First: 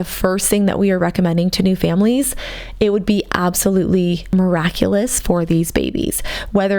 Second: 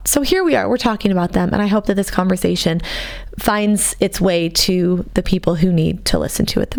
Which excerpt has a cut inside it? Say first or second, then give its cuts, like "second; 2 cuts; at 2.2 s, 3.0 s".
first; 1 cut; at 4.2 s